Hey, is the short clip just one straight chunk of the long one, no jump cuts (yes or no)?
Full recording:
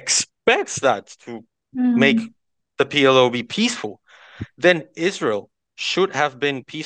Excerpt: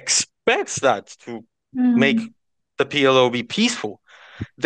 yes